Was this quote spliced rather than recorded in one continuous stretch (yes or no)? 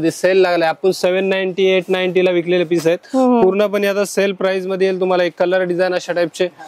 no